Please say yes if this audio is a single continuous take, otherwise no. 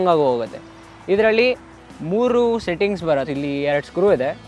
yes